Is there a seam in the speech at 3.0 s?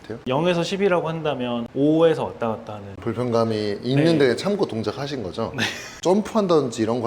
yes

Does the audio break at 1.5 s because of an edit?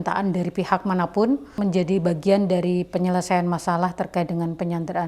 yes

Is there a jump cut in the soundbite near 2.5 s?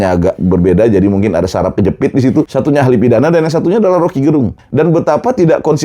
yes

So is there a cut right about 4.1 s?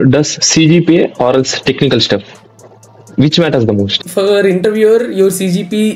yes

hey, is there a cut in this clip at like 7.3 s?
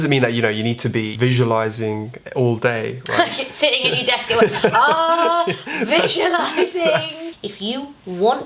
yes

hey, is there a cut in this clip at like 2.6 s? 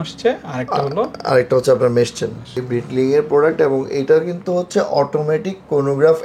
yes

